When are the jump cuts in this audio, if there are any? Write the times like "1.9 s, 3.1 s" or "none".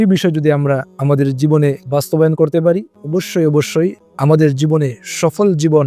3.0 s, 4.0 s